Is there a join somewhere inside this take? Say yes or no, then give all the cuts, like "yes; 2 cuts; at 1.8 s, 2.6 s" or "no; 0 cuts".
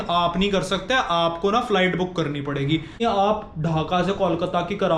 yes; 1 cut; at 3.0 s